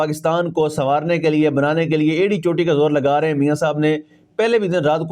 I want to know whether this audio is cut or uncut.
uncut